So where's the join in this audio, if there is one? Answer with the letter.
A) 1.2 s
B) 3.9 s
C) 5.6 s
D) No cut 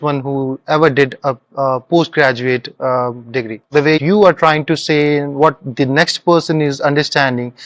B